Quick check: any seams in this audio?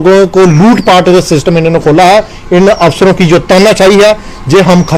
no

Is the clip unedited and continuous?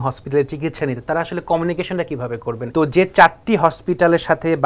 yes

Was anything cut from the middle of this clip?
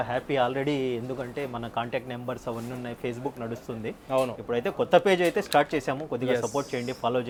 no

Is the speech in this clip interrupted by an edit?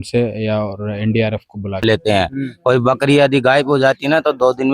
yes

